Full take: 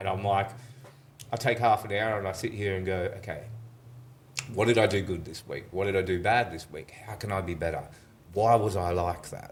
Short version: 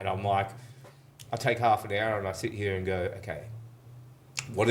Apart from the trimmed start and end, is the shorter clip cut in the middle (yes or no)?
no